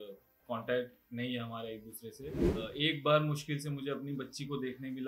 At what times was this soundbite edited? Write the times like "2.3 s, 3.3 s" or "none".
2.4 s